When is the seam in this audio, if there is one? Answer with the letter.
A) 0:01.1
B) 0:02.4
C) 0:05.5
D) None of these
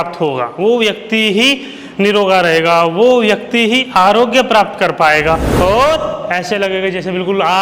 C